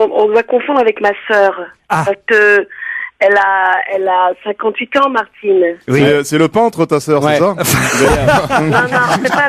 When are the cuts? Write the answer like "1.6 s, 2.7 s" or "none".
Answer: none